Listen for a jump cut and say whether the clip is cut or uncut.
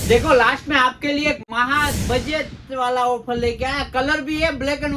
uncut